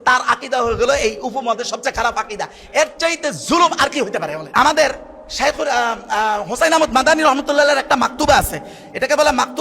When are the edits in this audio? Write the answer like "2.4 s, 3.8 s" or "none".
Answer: 4.4 s